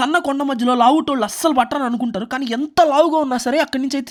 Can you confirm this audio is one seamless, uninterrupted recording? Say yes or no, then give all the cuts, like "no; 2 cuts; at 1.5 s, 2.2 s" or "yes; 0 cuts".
yes; 0 cuts